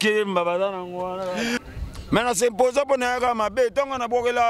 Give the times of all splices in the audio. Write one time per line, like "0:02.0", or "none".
0:01.6